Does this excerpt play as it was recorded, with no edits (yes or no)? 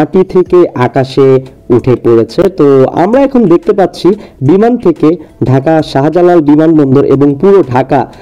yes